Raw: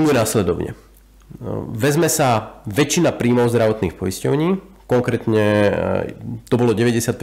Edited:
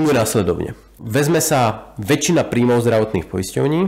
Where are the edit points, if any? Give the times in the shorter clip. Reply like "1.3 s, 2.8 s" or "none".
0.9 s